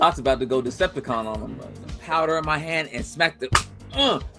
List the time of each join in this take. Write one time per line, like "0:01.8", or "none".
0:01.9